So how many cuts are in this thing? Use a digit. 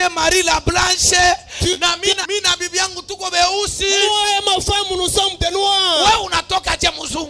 1